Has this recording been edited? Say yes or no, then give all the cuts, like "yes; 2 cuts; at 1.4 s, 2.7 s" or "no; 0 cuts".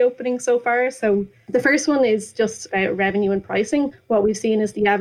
yes; 3 cuts; at 1.4 s, 2.7 s, 4.0 s